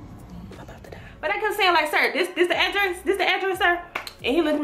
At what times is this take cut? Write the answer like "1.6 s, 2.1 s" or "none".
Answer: 1.1 s